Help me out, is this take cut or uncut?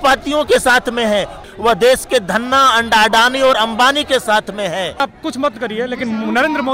cut